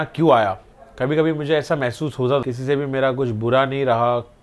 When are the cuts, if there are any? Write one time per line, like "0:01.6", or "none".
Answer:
0:02.4

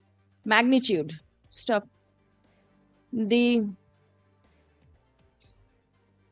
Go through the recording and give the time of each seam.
none

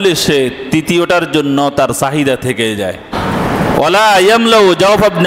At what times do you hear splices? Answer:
0:03.1

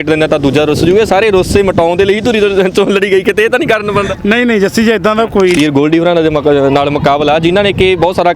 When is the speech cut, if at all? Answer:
0:05.6

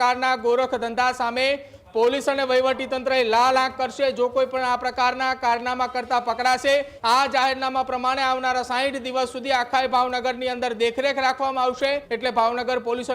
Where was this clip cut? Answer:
0:06.9
0:12.1

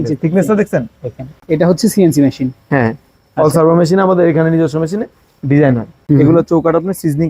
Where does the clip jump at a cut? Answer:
0:01.3
0:05.9

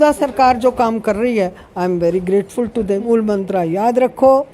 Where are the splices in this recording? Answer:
0:03.1

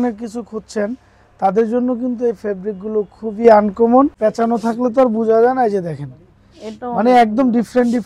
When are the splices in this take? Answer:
0:04.1

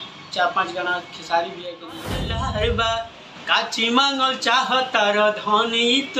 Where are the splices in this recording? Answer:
0:02.1

